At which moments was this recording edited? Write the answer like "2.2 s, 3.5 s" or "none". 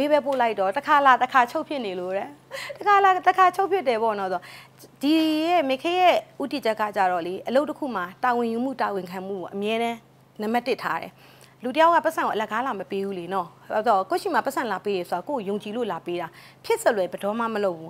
none

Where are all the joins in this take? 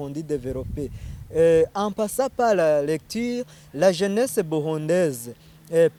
none

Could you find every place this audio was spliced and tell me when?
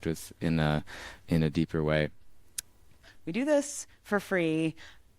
1.1 s, 3.0 s

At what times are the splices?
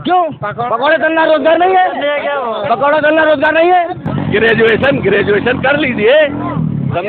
4.0 s

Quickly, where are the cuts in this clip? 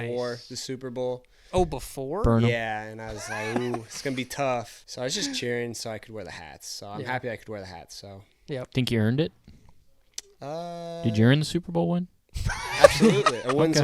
4.8 s

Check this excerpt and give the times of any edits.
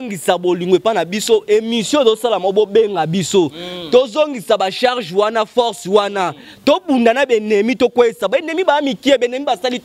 none

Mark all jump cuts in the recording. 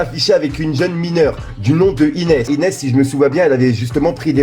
2.5 s

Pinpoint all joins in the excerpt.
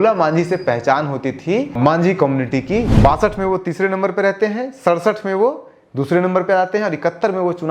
1.8 s, 2.9 s

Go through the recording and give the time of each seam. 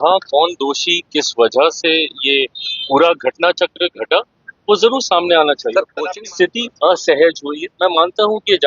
5.9 s

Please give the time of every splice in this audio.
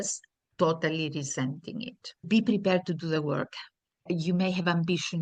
2.2 s, 4.0 s

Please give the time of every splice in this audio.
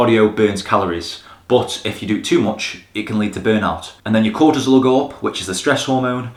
none

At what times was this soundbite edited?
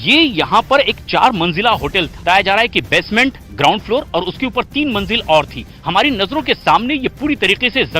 2.1 s

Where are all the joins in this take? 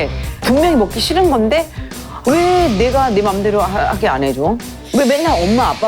2.1 s

